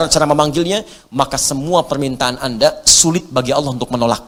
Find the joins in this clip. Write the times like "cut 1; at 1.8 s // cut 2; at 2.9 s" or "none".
none